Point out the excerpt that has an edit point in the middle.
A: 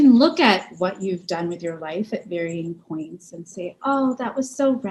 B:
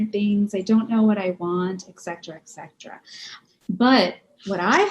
B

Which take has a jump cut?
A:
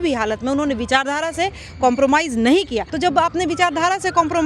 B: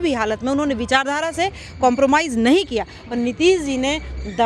A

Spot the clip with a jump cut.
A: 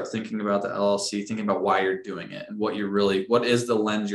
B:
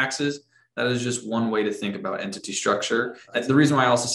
B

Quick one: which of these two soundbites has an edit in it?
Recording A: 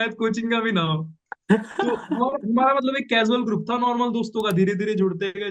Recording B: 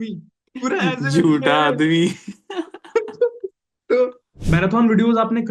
B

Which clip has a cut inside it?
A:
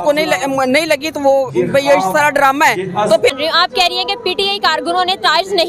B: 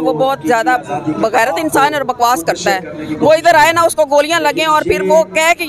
A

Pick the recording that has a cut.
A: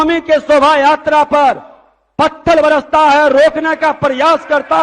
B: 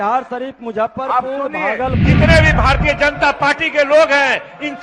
B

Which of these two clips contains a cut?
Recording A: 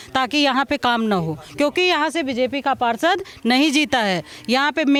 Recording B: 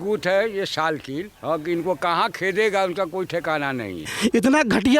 B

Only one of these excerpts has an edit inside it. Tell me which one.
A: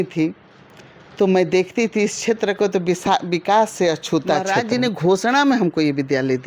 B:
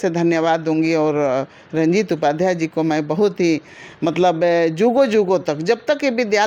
A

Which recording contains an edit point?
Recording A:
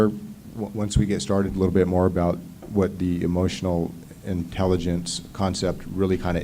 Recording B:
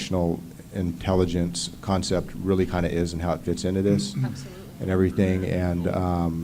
A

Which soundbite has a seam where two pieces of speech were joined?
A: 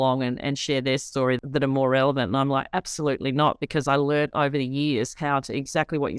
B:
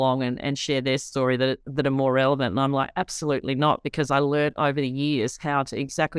A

